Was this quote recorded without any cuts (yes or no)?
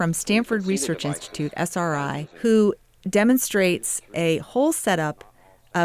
yes